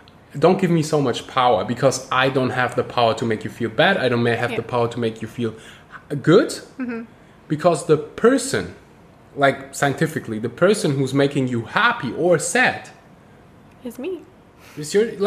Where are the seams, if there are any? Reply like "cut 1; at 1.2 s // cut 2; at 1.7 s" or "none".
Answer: none